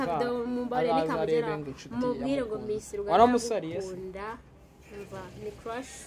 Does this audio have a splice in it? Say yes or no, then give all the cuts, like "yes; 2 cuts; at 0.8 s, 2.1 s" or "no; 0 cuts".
no; 0 cuts